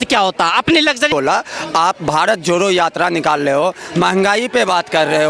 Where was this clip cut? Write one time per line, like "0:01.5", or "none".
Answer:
0:01.1